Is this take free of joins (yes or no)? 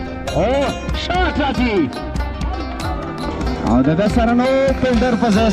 yes